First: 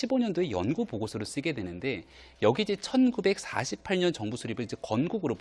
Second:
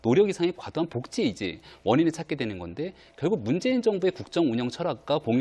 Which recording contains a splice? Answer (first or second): first